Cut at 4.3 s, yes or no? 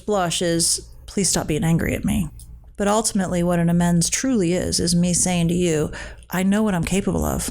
no